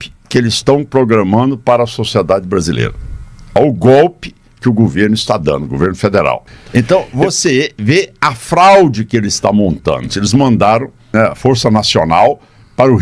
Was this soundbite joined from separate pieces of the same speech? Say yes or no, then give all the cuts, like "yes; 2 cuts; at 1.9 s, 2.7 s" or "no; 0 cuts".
yes; 3 cuts; at 6.5 s, 10.1 s, 11.1 s